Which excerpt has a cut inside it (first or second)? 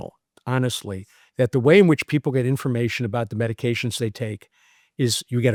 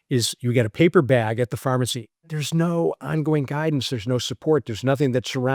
second